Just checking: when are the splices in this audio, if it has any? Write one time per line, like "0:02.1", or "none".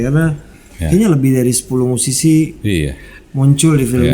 none